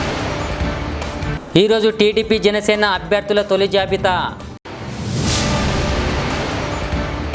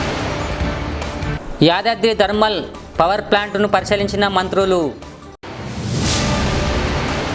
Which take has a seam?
first; 1 cut; at 1.3 s

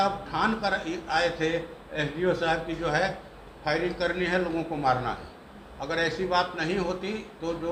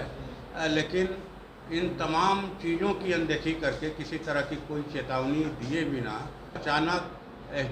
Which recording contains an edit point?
second; 1 cut; at 6.6 s

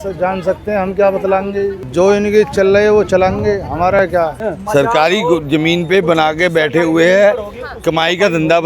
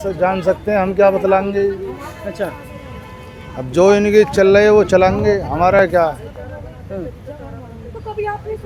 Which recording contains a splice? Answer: first; 2 cuts; at 1.8 s, 4.4 s

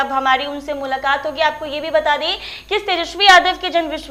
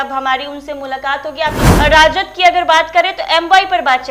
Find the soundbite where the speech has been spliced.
second; 1 cut; at 1.6 s

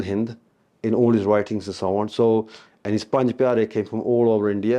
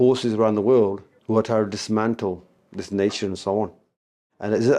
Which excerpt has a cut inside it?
second; 1 cut; at 1.1 s

